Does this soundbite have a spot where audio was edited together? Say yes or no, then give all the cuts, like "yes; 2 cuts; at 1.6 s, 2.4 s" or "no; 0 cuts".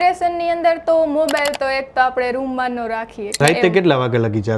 yes; 1 cut; at 3.4 s